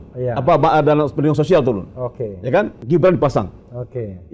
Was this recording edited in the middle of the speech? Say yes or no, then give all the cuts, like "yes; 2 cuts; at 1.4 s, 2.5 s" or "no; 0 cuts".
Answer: yes; 1 cut; at 2.8 s